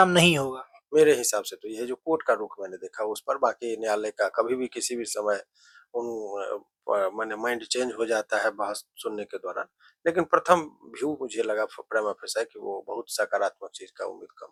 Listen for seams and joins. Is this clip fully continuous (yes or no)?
yes